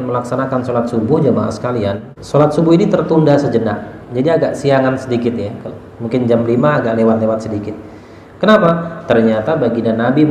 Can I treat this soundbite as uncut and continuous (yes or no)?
no